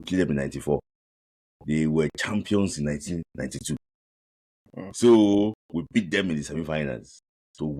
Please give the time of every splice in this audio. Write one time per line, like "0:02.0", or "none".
none